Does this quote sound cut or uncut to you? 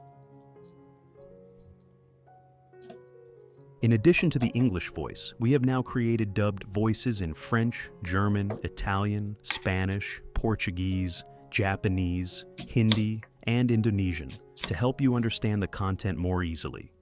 cut